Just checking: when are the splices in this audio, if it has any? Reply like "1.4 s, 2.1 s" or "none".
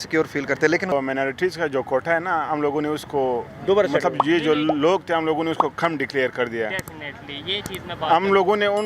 0.9 s